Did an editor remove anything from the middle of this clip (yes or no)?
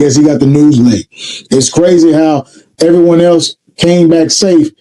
no